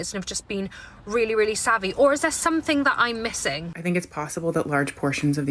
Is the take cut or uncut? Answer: cut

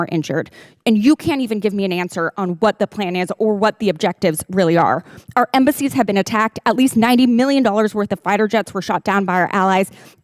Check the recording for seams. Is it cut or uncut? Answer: uncut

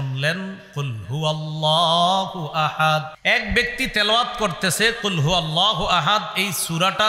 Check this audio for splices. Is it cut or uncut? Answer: cut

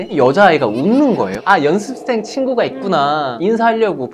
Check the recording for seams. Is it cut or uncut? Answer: cut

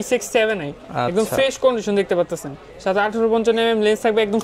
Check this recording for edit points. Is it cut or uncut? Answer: uncut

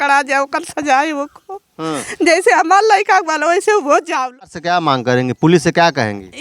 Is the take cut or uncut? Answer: cut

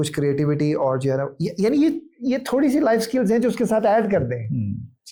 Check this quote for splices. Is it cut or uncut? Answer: uncut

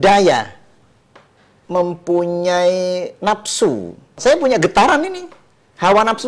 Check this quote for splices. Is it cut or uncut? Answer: cut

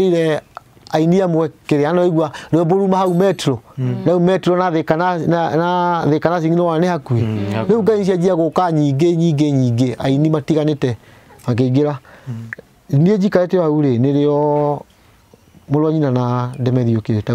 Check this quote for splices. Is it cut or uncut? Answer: uncut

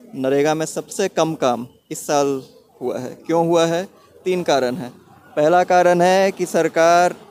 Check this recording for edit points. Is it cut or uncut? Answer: uncut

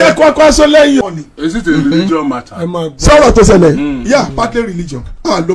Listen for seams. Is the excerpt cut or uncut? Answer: cut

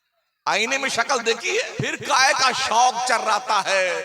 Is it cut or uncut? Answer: cut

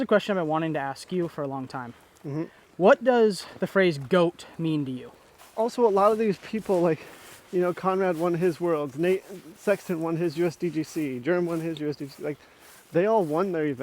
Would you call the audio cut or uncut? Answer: cut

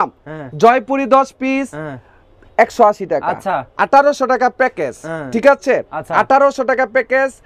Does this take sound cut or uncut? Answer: uncut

